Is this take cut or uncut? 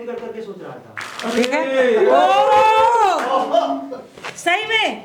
uncut